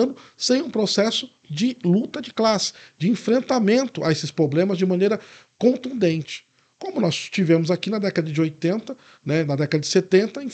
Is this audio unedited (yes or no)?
yes